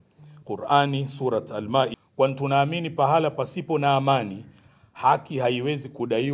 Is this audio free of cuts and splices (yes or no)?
no